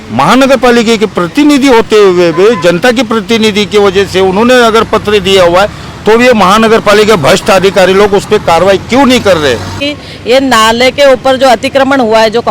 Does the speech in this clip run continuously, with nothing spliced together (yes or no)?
no